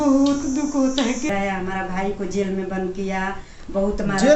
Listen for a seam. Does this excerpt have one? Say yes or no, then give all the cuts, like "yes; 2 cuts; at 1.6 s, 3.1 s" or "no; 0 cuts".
yes; 1 cut; at 1.3 s